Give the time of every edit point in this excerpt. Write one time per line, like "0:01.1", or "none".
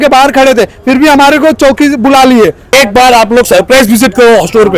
0:02.7